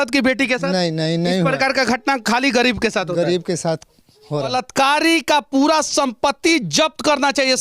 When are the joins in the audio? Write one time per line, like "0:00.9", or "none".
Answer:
0:04.5